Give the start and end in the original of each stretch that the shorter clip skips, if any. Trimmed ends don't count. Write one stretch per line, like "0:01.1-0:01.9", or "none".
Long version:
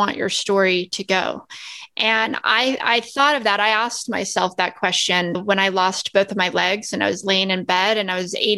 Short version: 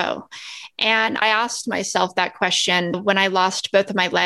0:02.4-0:03.6